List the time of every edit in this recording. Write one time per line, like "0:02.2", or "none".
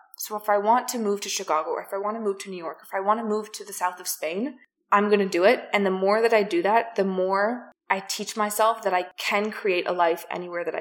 0:07.7
0:09.2